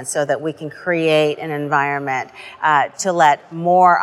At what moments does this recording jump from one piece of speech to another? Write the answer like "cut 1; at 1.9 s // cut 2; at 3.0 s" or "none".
none